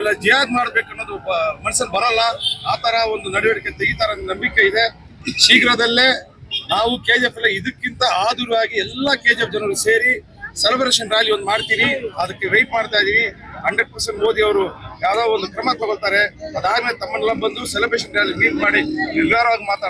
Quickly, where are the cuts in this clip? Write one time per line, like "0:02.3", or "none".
none

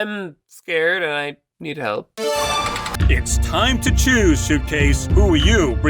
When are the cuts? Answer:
0:02.9

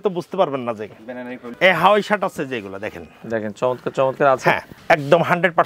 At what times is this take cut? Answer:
0:01.4
0:04.7

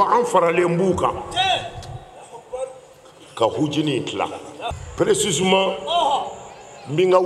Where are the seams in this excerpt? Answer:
0:04.8

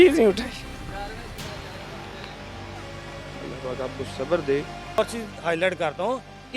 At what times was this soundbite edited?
0:05.0

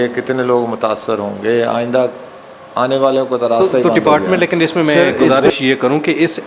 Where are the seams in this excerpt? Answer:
0:03.7

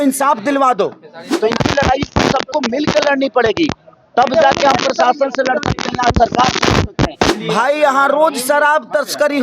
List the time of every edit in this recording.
0:01.3
0:07.3

